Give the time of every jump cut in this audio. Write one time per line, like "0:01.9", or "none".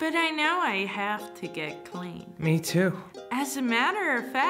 none